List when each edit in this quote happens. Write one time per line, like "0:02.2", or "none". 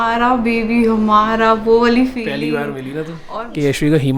0:03.1